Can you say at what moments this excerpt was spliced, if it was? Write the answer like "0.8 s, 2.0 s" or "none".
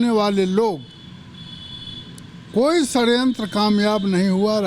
none